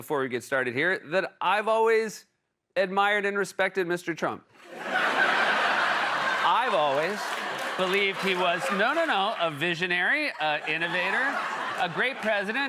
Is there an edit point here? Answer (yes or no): no